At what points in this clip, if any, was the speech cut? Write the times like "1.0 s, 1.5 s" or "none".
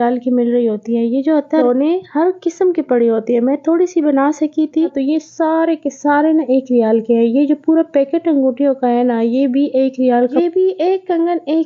1.6 s, 5.0 s, 10.4 s